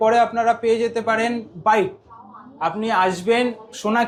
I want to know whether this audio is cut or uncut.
uncut